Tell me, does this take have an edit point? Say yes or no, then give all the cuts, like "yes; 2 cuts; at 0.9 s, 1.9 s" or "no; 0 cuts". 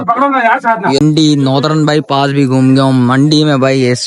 yes; 1 cut; at 1.0 s